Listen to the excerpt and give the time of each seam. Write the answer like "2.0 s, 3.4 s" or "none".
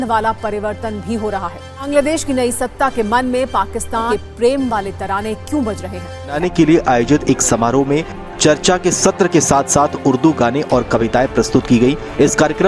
1.7 s, 4.1 s, 6.4 s